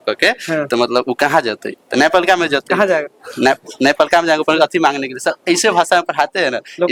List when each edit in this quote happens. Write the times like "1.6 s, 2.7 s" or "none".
none